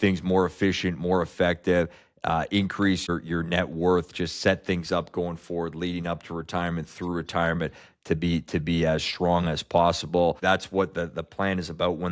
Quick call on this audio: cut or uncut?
cut